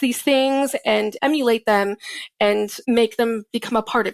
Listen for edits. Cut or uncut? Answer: cut